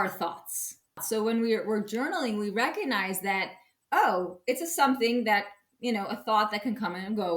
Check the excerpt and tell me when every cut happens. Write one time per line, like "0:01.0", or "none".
0:01.0